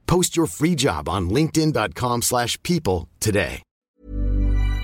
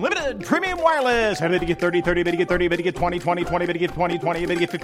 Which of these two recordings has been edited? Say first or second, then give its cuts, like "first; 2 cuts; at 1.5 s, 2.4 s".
first; 1 cut; at 3.9 s